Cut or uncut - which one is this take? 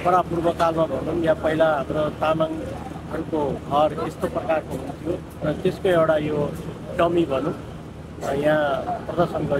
uncut